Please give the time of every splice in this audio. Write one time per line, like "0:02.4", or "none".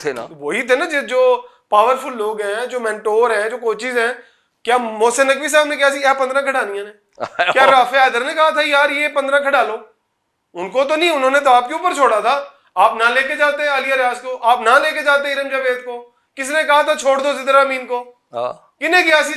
none

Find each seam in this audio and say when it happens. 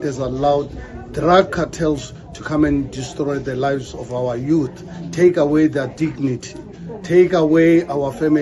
none

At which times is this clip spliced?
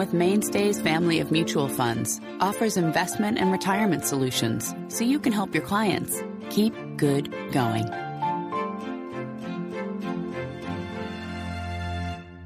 none

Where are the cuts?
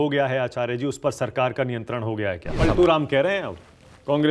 0:02.6

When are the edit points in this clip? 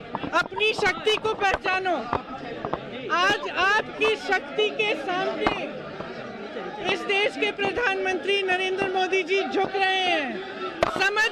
none

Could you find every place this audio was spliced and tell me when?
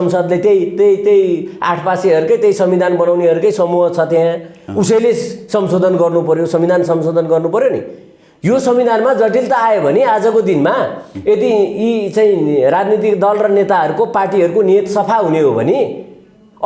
none

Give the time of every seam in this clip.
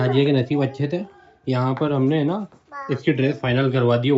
none

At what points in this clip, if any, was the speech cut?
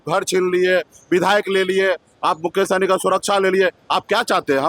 none

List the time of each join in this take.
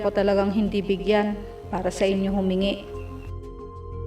none

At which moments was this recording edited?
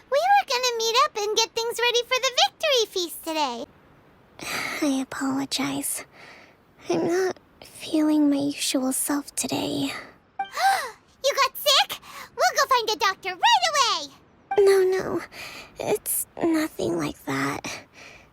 0:03.7

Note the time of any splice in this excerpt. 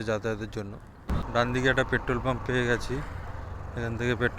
0:01.1

